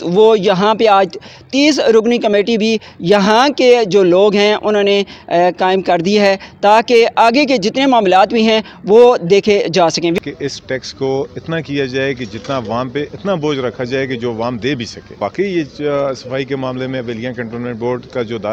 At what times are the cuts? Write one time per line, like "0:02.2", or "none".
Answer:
0:10.2
0:15.2